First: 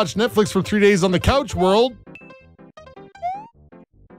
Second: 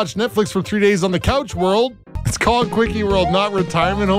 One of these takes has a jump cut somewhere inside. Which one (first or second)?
second